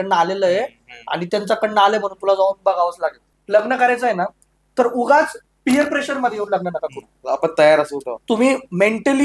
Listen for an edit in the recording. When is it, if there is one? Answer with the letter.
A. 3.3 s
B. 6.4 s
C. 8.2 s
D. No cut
A